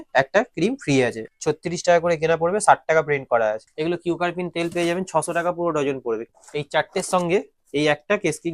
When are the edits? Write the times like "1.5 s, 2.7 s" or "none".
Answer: 1.3 s, 3.7 s, 6.2 s